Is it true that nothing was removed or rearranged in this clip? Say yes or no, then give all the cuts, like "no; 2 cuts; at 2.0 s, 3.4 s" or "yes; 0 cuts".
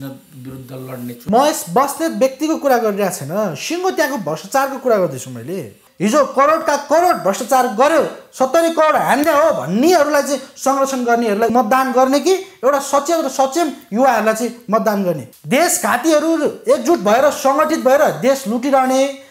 no; 4 cuts; at 1.2 s, 5.8 s, 11.5 s, 15.3 s